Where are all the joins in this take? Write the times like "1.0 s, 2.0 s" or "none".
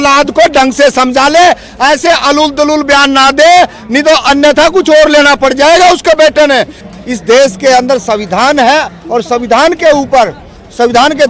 6.7 s

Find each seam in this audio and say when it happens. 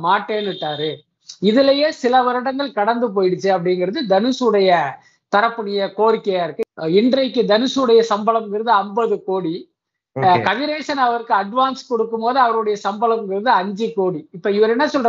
6.6 s

